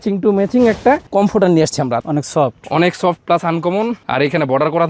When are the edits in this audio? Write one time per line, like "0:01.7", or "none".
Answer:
0:02.0